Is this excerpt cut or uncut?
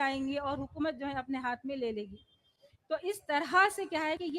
uncut